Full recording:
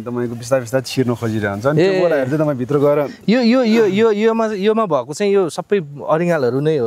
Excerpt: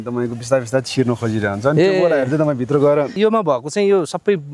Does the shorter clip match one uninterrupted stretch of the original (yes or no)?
no